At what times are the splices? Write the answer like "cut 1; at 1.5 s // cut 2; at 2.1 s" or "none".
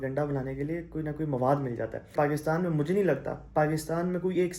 cut 1; at 2.1 s

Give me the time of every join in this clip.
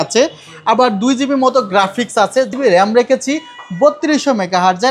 cut 1; at 2.5 s

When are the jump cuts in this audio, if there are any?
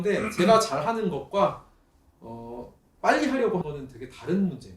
cut 1; at 3.6 s

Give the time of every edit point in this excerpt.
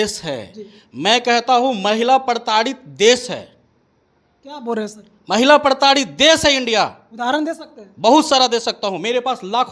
none

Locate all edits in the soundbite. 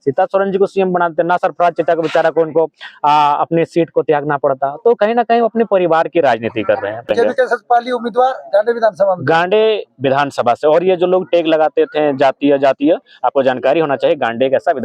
cut 1; at 7.1 s

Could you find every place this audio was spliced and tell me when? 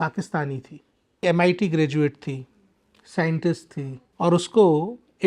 cut 1; at 1.2 s // cut 2; at 4.0 s

